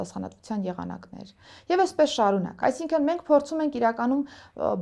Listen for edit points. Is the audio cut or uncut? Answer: uncut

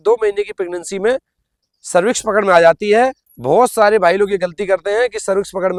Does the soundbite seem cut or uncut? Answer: uncut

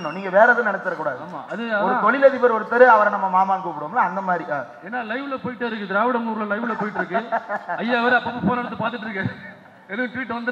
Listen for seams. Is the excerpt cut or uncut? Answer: uncut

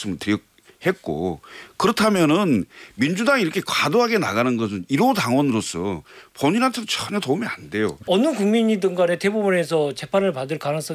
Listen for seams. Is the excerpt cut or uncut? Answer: cut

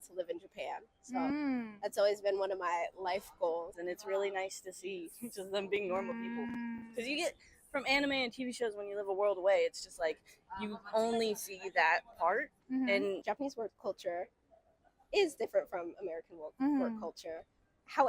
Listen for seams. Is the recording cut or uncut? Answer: cut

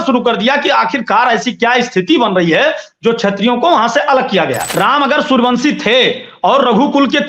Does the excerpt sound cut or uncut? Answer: cut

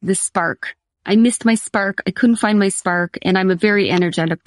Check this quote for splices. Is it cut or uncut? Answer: uncut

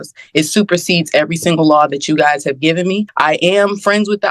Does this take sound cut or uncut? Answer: cut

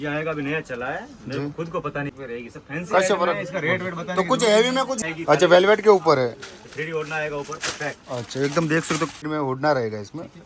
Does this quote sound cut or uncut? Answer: cut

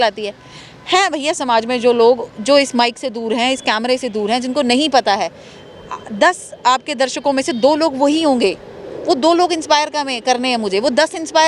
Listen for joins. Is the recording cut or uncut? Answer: uncut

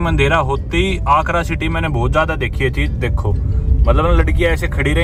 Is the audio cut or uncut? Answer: uncut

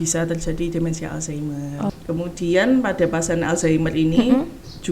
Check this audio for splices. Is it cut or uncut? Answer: cut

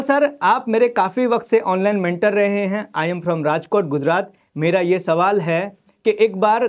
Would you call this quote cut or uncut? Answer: uncut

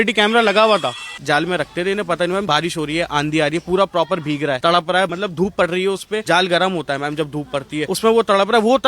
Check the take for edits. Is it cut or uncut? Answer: cut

